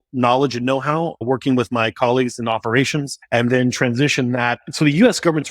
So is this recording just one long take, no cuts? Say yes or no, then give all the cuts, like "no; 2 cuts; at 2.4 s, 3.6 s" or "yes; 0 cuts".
no; 3 cuts; at 1.2 s, 3.2 s, 4.6 s